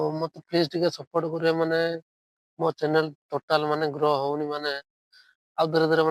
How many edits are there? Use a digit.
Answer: 0